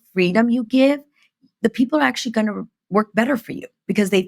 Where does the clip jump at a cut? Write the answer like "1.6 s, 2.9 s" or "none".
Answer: none